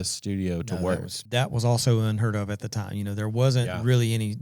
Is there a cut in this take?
yes; 1 cut; at 1.1 s

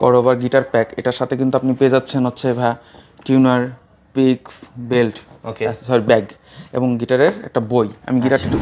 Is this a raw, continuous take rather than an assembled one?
yes; 0 cuts

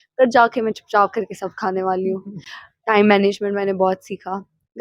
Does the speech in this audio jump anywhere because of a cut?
no; 0 cuts

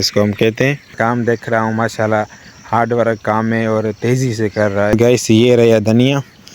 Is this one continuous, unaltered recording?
no; 2 cuts; at 0.9 s, 4.9 s

